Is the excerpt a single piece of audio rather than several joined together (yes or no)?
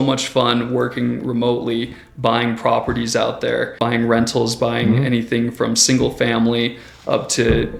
no